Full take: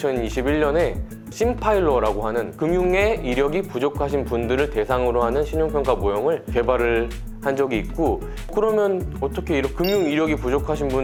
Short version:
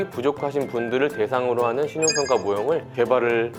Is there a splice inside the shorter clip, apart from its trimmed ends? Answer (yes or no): no